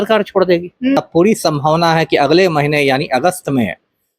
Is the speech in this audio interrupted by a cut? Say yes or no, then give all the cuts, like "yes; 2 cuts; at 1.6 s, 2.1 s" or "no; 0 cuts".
yes; 1 cut; at 1.0 s